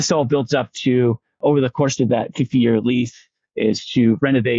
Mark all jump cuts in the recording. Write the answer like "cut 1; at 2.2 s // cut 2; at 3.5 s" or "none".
cut 1; at 1.4 s